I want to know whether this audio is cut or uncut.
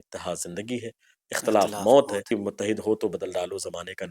cut